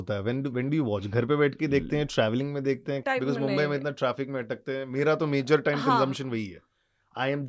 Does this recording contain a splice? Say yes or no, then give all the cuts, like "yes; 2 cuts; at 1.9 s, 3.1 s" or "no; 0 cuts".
yes; 1 cut; at 3.0 s